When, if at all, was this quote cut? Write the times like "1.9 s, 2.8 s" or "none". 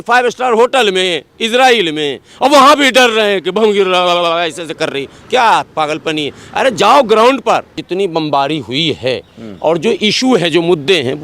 7.8 s